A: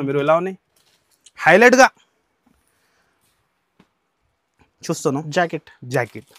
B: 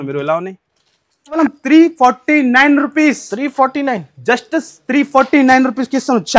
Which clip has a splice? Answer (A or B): B